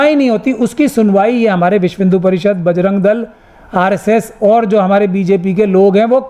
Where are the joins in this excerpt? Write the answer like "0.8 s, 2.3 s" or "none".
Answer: none